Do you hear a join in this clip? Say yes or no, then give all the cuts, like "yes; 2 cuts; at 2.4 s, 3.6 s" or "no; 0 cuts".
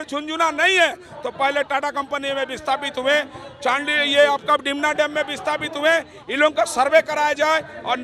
no; 0 cuts